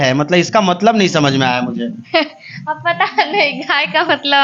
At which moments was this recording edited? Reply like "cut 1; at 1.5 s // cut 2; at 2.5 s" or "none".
none